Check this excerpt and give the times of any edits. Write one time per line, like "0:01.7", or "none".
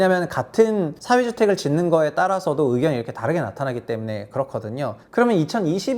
0:01.0
0:05.0